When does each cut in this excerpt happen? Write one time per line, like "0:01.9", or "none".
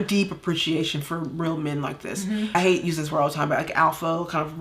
0:02.5